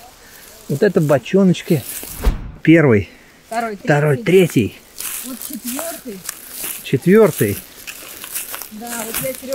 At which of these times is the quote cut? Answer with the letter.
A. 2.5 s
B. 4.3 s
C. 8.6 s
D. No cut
A